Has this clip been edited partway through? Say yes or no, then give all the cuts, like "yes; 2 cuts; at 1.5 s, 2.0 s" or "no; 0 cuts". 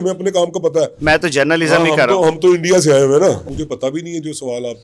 yes; 2 cuts; at 1.0 s, 3.5 s